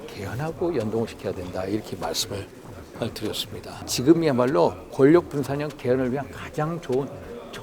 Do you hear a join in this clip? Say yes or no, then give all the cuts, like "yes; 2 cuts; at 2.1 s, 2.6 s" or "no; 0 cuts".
yes; 1 cut; at 3.9 s